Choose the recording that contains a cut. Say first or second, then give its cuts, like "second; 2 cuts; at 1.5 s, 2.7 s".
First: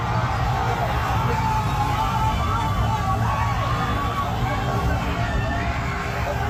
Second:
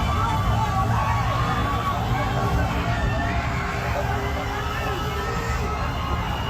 second; 1 cut; at 5.5 s